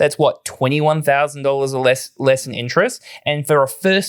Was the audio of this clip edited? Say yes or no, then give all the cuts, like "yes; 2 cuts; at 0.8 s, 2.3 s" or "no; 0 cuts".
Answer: no; 0 cuts